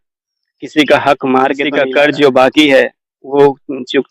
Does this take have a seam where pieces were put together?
yes; 1 cut; at 1.6 s

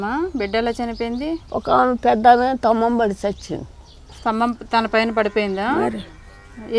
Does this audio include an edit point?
yes; 1 cut; at 1.4 s

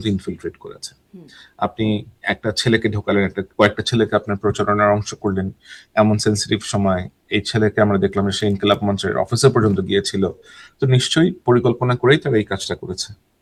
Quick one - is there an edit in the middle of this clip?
no; 0 cuts

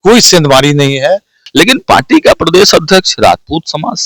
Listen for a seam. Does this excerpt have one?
yes; 1 cut; at 1.4 s

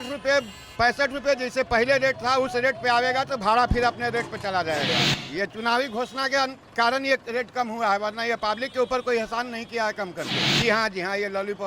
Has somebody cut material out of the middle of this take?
yes; 2 cuts; at 5.1 s, 10.4 s

